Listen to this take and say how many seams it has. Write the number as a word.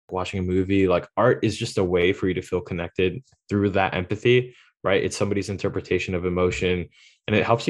zero